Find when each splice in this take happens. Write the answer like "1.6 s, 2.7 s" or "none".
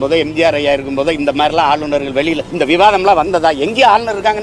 2.5 s